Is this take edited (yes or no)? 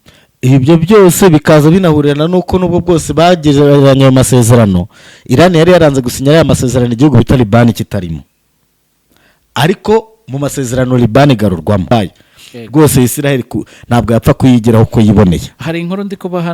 yes